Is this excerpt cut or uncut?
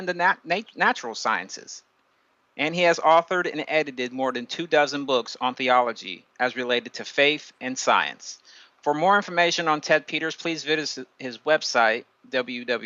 uncut